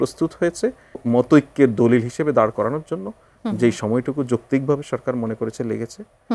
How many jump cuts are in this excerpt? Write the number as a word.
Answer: one